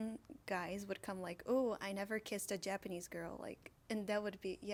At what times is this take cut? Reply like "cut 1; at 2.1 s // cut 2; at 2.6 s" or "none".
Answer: none